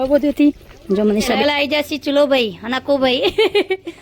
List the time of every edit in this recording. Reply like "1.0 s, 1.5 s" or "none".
1.4 s